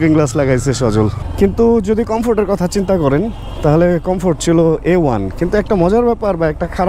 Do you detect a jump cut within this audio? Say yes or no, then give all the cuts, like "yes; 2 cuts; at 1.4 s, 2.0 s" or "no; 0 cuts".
yes; 1 cut; at 1.2 s